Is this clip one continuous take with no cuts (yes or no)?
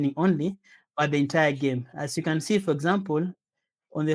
yes